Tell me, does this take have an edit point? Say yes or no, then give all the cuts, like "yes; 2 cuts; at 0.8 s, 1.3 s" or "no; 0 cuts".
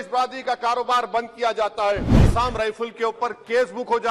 yes; 1 cut; at 2.3 s